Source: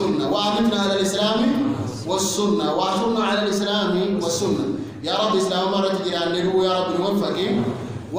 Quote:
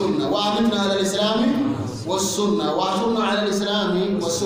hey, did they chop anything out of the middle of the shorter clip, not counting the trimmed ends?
no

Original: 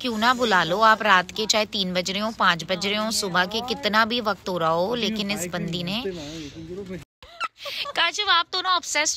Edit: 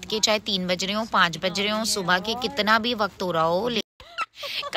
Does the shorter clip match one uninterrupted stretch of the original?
no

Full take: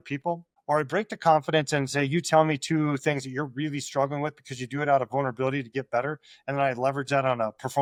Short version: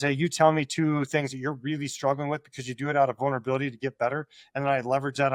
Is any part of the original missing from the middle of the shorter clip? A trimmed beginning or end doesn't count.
no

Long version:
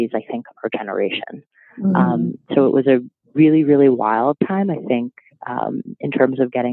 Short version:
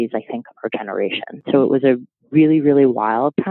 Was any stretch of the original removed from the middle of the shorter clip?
yes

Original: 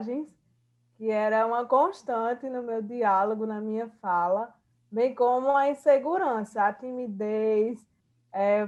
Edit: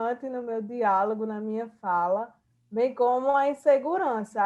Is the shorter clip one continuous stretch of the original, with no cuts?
yes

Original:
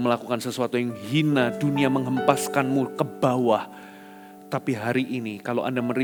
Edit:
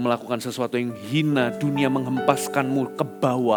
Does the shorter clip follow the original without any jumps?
yes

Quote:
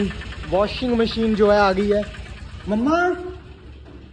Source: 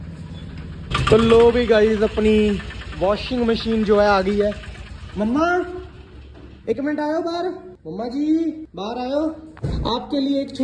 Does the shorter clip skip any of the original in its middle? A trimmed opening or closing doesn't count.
no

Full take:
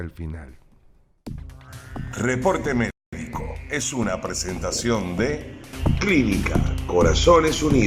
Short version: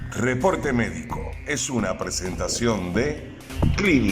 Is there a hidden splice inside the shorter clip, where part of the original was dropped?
yes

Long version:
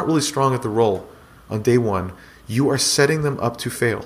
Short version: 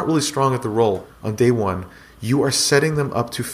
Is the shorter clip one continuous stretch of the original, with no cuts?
no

